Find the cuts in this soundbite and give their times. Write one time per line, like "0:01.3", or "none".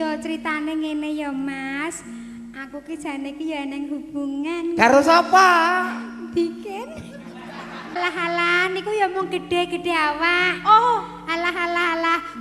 0:08.0